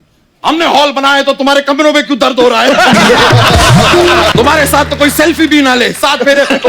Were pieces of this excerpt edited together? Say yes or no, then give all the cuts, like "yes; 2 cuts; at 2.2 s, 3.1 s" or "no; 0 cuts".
yes; 1 cut; at 4.3 s